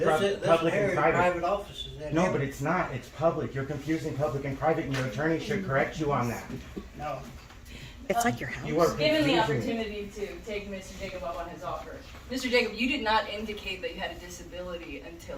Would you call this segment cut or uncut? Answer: uncut